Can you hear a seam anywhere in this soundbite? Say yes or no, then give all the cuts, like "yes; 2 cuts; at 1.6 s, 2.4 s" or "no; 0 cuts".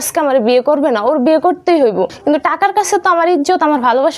yes; 1 cut; at 2.1 s